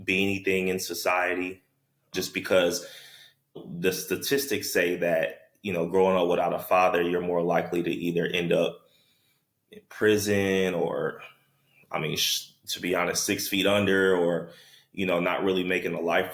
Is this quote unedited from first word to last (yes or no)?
no